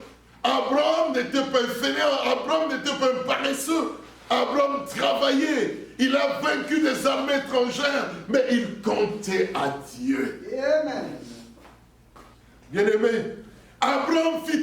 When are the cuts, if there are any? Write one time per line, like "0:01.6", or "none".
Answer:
0:12.3